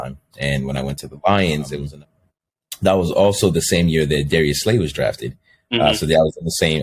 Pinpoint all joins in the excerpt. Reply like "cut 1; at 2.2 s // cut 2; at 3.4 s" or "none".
cut 1; at 1.8 s